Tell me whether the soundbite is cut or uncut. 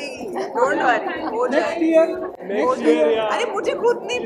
uncut